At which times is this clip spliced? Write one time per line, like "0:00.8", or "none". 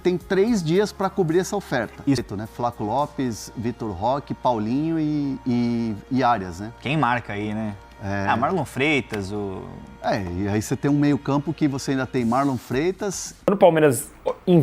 0:02.2
0:13.5